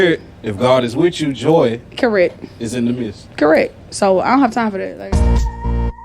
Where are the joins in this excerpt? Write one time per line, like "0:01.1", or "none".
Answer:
0:05.1